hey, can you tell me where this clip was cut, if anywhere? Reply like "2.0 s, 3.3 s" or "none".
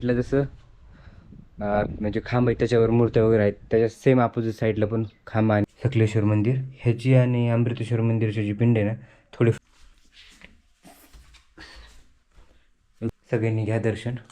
5.6 s, 9.6 s, 13.1 s